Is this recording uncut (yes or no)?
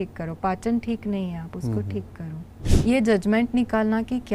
no